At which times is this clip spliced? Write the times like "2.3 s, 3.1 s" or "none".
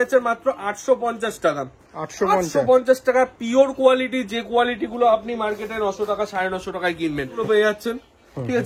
7.4 s